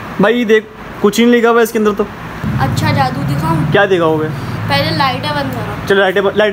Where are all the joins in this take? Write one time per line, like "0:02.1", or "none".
none